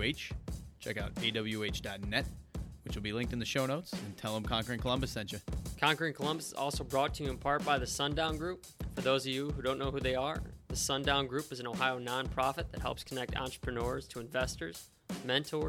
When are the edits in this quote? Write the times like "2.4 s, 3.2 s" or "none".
5.7 s